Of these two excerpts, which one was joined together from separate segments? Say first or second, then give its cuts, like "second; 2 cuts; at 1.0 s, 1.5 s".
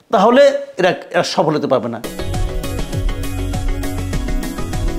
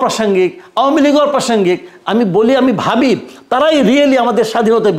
first; 1 cut; at 2.0 s